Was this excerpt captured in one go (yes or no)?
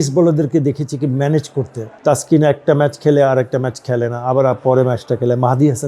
no